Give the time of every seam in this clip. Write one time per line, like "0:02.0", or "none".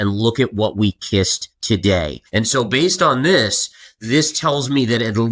0:01.5
0:02.2